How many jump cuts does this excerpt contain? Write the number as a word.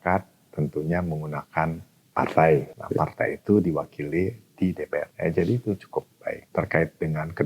four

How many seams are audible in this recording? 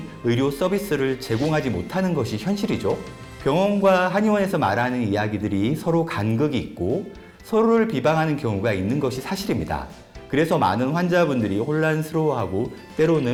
zero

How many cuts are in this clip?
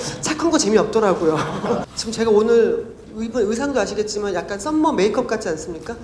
one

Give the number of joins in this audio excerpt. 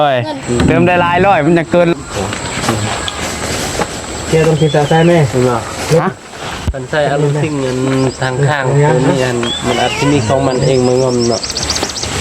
one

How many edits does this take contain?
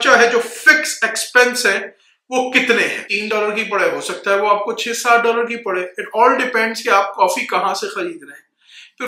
one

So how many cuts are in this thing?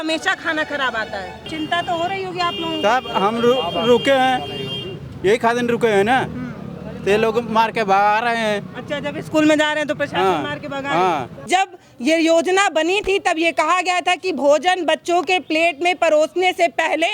two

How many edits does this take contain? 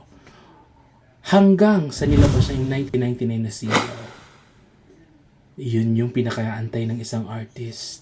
zero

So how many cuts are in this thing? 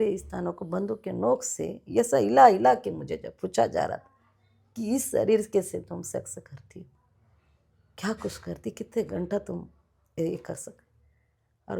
zero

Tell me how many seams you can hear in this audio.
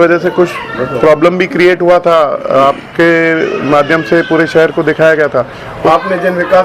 one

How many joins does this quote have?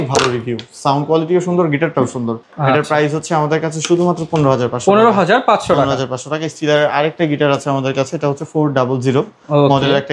zero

